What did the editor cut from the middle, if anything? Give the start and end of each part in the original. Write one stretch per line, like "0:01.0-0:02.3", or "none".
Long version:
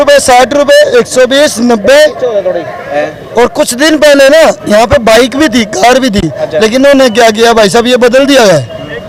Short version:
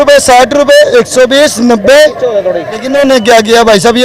0:02.8-0:06.7